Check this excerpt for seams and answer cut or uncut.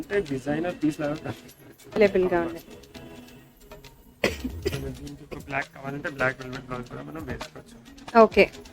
cut